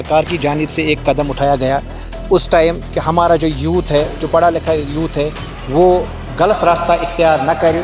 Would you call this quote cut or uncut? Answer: uncut